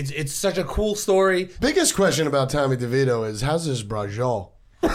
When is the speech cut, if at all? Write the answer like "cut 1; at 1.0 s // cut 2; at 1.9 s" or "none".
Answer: cut 1; at 1.5 s